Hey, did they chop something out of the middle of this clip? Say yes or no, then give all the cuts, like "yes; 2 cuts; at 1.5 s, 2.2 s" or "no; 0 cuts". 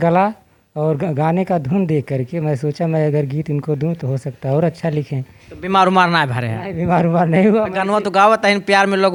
no; 0 cuts